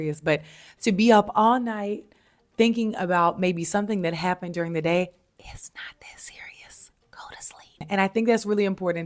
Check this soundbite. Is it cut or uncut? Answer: cut